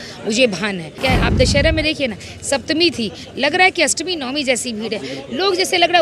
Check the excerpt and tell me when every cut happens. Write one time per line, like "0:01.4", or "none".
0:01.0

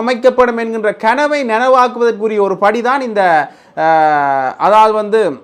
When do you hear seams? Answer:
none

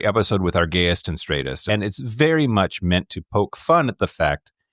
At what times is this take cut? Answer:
0:01.6

